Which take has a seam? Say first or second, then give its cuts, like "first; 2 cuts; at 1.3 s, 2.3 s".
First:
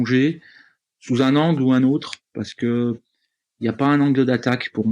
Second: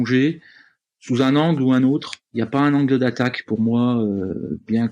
second; 1 cut; at 2.2 s